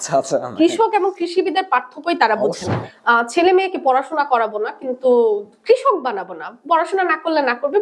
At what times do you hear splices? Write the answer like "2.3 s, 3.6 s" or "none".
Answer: 2.9 s